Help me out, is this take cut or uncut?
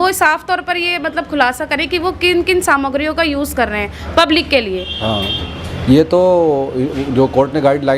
uncut